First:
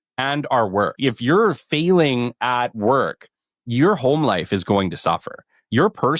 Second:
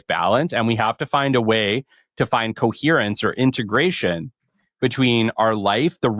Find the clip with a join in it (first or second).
first